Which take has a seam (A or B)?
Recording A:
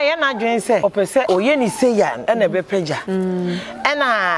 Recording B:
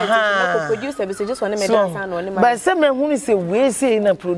A